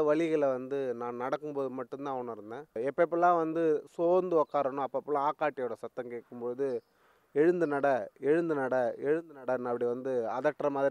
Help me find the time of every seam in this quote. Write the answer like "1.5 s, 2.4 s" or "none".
2.8 s